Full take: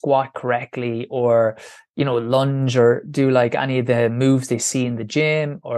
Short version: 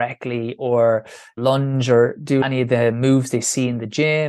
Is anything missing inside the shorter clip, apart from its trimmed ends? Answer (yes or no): yes